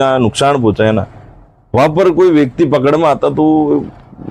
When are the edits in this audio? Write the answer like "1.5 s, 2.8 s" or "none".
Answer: none